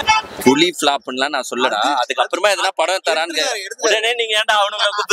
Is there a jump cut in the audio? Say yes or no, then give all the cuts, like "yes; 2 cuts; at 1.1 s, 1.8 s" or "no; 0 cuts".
no; 0 cuts